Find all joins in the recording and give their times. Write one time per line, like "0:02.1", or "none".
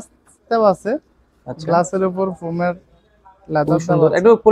none